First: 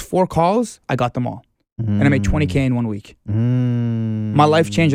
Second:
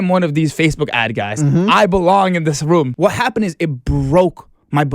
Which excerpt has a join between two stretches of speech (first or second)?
second